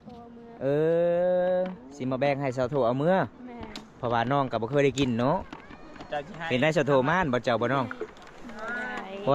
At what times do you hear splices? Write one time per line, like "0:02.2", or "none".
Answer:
none